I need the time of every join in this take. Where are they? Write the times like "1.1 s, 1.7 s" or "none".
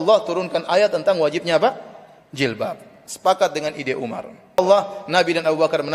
4.6 s